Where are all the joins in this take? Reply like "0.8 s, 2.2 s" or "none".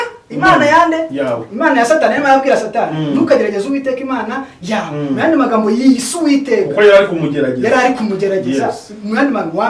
none